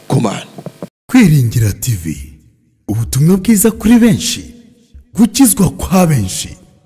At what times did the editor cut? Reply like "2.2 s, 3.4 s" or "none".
0.9 s